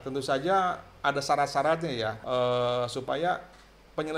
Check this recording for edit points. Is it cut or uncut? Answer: cut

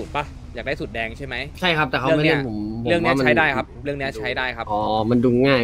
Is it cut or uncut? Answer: cut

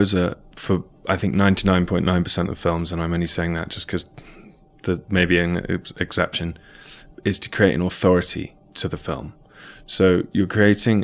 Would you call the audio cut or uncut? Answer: cut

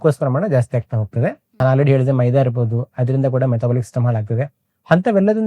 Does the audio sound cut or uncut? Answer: cut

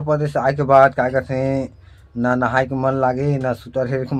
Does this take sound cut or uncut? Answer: uncut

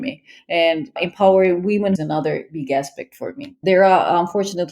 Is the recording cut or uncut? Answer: cut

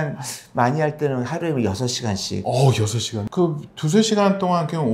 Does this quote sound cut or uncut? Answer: uncut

